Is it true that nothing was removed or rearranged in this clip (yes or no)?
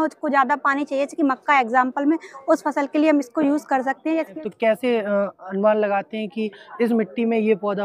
no